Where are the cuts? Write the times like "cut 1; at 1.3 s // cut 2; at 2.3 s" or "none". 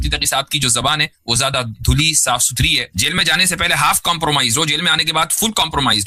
cut 1; at 2.9 s

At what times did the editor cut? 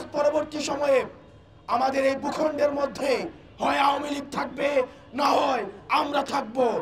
none

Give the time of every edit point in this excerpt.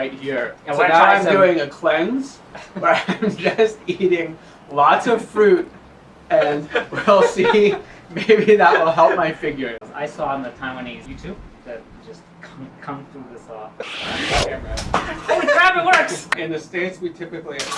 cut 1; at 9.8 s // cut 2; at 11.0 s // cut 3; at 13.8 s // cut 4; at 16.4 s

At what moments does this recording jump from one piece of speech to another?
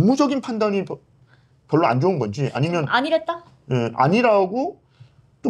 none

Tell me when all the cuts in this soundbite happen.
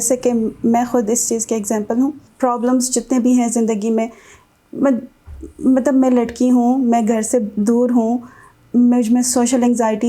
cut 1; at 2.3 s

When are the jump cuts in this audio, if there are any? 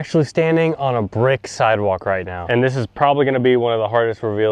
cut 1; at 2.4 s

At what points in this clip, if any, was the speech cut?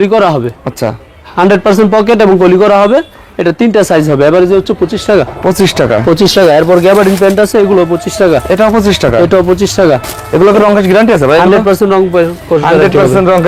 none

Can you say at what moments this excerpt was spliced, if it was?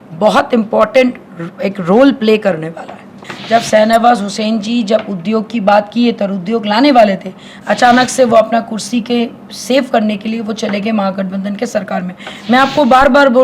cut 1; at 3.3 s

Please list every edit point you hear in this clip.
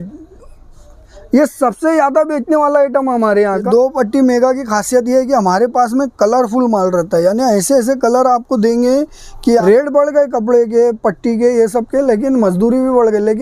cut 1; at 3.7 s // cut 2; at 9.6 s

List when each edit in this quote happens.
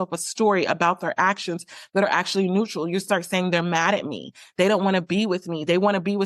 none

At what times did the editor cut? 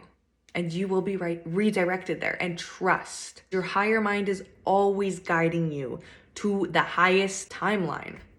cut 1; at 3.5 s // cut 2; at 7.5 s

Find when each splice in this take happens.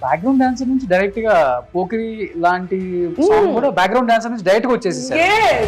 none

